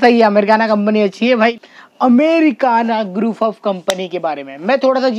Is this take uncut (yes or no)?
no